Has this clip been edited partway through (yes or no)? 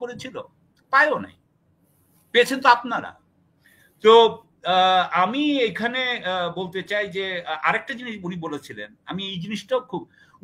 no